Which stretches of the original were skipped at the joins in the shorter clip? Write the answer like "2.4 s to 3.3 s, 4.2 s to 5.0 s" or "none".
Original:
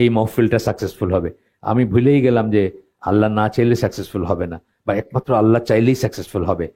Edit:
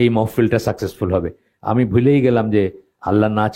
none